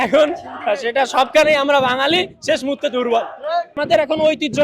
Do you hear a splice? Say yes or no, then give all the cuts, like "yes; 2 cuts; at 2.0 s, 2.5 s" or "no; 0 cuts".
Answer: yes; 1 cut; at 3.7 s